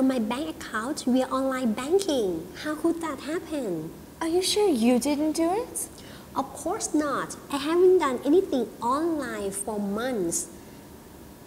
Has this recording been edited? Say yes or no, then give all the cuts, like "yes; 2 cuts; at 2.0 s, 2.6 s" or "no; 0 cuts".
yes; 1 cut; at 2.6 s